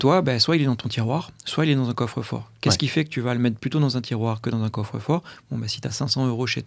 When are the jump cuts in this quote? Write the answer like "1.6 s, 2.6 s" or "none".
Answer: none